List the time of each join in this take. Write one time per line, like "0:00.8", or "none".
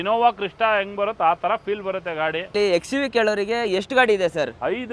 0:02.5